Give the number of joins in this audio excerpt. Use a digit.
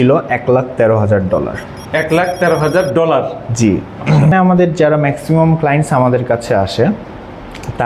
1